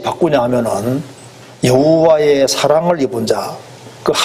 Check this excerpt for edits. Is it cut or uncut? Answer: uncut